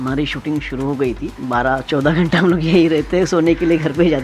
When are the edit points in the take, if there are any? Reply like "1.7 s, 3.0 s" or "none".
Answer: 1.3 s